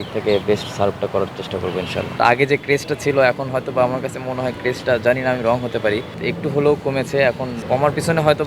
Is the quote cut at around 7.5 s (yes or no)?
yes